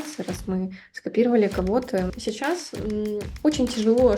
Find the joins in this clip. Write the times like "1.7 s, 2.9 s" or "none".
2.1 s, 3.2 s